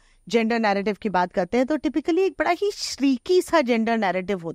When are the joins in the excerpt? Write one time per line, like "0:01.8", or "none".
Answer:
none